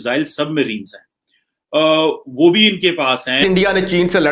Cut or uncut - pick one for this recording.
cut